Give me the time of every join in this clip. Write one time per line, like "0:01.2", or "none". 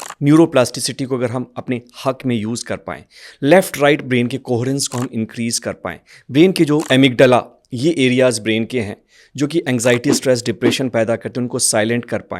0:06.8